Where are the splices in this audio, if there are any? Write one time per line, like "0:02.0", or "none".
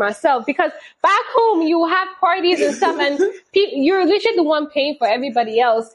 none